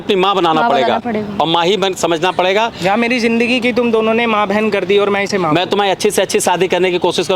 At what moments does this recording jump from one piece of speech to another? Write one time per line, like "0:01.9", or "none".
none